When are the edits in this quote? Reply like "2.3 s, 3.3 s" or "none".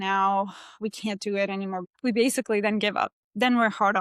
1.9 s